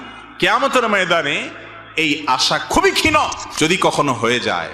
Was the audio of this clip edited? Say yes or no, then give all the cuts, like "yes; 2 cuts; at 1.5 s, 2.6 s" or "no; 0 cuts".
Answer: yes; 1 cut; at 3.4 s